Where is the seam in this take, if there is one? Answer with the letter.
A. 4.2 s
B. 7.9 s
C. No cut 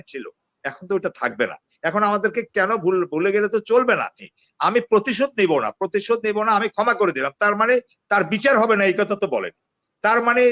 A